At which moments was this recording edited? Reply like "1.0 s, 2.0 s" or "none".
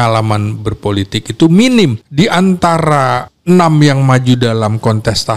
2.0 s, 3.3 s